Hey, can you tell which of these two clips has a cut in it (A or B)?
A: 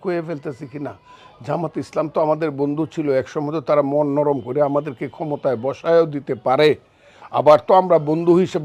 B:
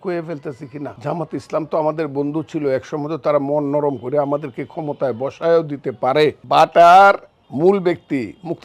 B